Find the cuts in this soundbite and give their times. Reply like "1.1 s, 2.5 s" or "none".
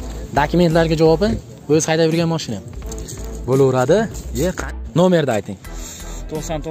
4.6 s